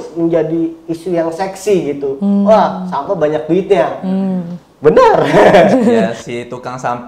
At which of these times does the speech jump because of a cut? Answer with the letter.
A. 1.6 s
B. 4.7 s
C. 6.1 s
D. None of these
C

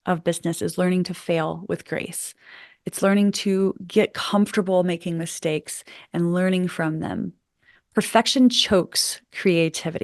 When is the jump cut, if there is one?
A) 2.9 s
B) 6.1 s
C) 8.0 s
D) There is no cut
D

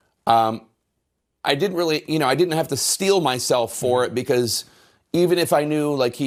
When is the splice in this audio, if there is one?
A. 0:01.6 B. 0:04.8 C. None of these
C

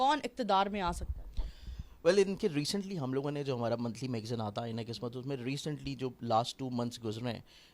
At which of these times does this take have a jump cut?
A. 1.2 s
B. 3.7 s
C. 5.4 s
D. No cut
D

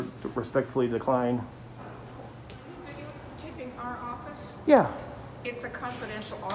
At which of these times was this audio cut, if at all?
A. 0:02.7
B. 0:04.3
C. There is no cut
A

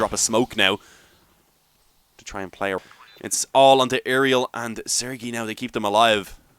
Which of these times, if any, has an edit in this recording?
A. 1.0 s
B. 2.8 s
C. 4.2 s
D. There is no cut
B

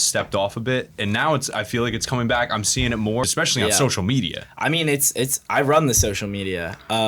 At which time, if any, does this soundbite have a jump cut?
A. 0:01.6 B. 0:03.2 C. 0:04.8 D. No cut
B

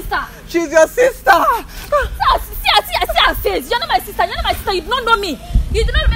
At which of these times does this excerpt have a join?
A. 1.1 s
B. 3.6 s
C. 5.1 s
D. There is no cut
D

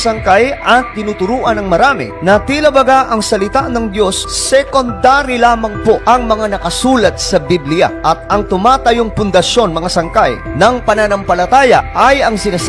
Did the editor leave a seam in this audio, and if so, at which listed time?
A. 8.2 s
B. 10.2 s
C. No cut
A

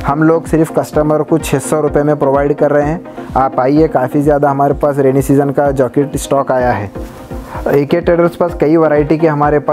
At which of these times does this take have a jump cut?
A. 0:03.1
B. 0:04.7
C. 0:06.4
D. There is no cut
D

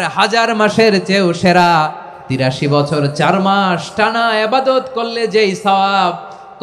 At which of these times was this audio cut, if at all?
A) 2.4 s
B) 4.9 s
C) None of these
A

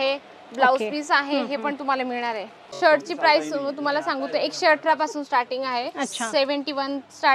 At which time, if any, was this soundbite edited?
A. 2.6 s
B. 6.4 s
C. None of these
A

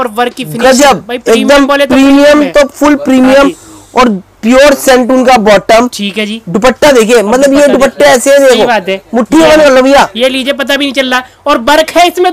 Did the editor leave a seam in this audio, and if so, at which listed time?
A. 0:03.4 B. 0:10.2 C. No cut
C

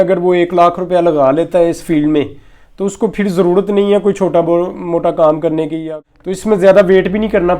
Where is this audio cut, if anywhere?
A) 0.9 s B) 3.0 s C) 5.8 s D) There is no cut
C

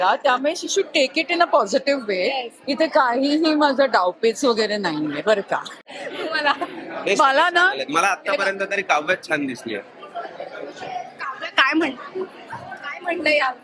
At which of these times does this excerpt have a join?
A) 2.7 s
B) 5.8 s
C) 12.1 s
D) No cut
B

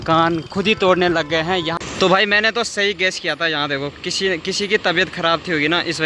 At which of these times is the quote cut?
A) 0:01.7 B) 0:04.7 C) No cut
A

